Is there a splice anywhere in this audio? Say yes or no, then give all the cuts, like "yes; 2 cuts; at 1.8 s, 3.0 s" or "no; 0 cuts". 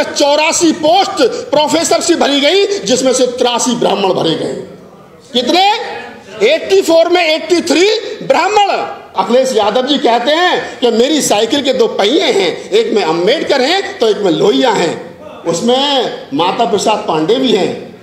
yes; 1 cut; at 9.1 s